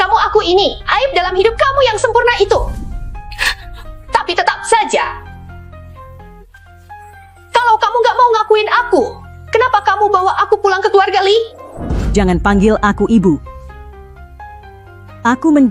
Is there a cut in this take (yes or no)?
yes